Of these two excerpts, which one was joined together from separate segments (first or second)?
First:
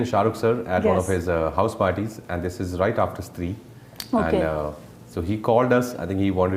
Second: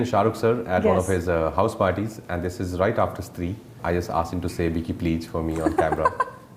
second